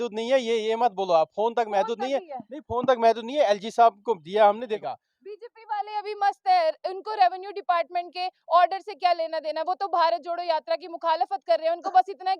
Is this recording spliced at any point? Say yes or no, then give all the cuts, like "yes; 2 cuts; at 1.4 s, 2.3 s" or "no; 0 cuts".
yes; 1 cut; at 4.8 s